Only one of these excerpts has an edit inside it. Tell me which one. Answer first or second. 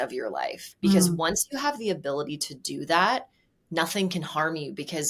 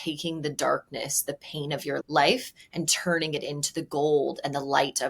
second